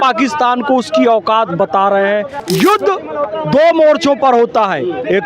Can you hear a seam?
yes; 1 cut; at 2.3 s

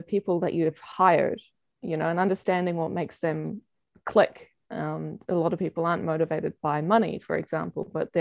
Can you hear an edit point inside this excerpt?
no; 0 cuts

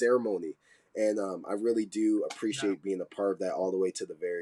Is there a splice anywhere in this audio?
no; 0 cuts

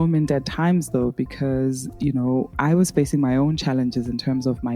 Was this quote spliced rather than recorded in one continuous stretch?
no; 0 cuts

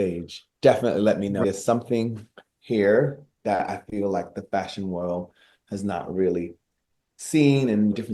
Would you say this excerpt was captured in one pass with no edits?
no; 1 cut; at 1.4 s

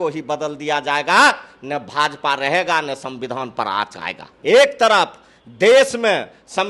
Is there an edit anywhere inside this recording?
yes; 1 cut; at 4.3 s

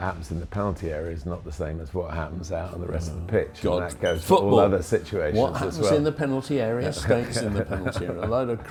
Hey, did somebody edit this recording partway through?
no; 0 cuts

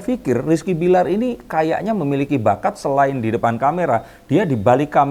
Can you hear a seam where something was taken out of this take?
no; 0 cuts

